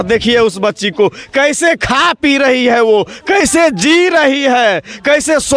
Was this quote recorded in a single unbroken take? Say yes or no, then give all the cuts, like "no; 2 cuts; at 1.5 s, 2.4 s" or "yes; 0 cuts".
yes; 0 cuts